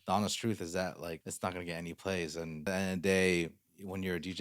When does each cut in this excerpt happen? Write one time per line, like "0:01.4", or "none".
0:01.2
0:02.6